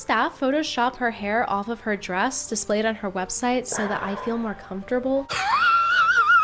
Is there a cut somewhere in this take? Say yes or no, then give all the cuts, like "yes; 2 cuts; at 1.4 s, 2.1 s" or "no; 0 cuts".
no; 0 cuts